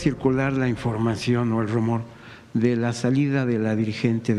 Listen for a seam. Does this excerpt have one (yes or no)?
no